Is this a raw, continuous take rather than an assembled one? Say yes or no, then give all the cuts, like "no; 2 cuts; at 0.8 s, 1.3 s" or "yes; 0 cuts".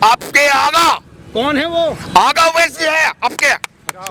yes; 0 cuts